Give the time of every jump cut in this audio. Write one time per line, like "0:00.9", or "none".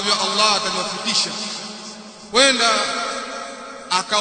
none